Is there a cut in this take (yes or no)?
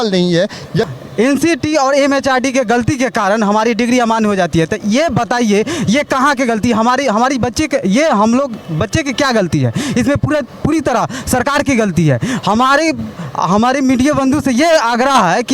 yes